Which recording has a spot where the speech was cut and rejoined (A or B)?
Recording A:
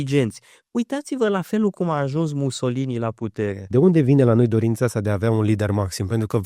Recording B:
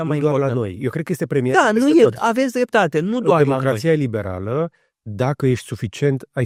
A